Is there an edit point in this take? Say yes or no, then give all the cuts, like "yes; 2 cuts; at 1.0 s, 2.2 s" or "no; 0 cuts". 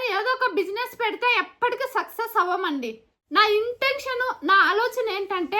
yes; 1 cut; at 3.1 s